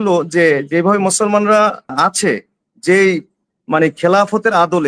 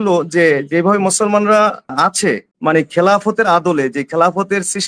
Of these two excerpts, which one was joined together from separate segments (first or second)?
second